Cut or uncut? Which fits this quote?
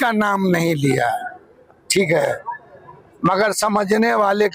uncut